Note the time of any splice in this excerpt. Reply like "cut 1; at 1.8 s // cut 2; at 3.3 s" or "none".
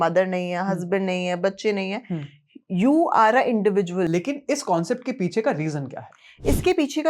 cut 1; at 4.1 s